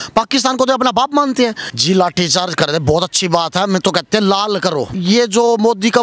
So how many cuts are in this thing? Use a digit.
2